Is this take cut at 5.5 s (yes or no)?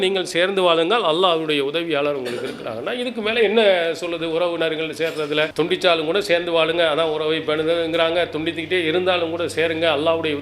yes